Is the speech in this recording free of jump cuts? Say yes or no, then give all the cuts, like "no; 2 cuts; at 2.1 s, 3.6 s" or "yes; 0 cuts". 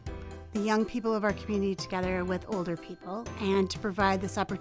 no; 1 cut; at 3.4 s